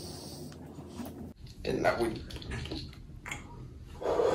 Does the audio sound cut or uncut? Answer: cut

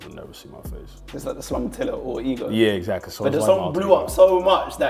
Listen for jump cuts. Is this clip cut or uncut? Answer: uncut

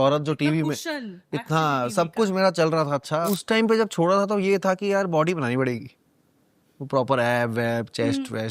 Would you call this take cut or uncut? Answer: cut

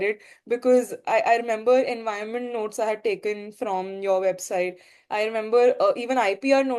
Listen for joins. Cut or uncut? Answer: uncut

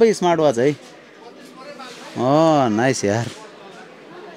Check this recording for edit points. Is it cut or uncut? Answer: uncut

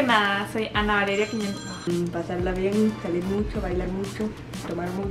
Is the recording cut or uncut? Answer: cut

